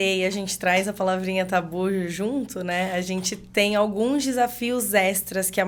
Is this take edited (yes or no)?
no